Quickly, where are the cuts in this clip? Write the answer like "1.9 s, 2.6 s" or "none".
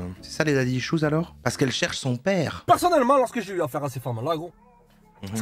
1.3 s, 2.6 s